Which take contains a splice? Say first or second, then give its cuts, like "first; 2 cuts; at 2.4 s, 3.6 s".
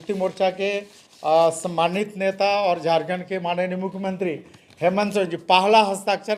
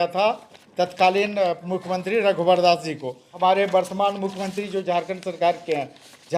second; 1 cut; at 3.2 s